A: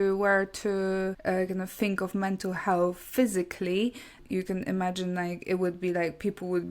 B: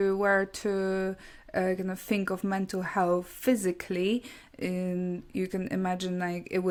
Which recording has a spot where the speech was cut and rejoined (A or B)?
A